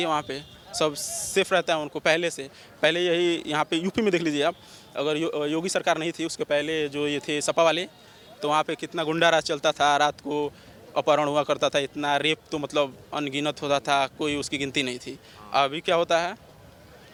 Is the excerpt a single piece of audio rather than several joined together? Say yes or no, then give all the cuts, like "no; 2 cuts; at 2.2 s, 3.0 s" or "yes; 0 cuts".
yes; 0 cuts